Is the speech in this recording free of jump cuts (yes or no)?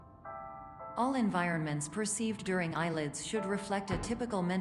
no